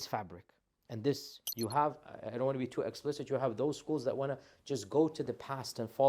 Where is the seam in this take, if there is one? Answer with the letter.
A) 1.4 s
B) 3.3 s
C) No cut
A